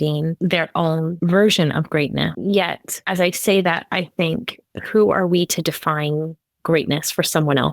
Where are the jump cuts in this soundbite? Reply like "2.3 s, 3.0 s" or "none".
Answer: 2.4 s